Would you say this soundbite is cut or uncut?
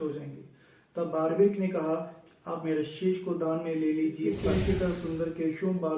cut